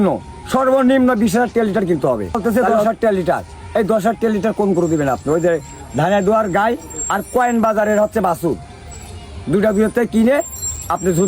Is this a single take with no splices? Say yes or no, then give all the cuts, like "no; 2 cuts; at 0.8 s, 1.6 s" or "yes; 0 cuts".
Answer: no; 1 cut; at 2.4 s